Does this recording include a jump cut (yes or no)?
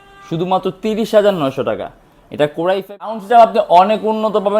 yes